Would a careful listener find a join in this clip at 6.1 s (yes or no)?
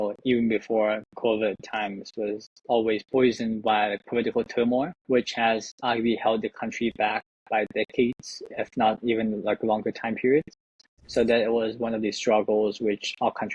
no